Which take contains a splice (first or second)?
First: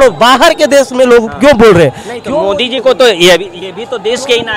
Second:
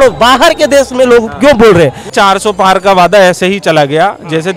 second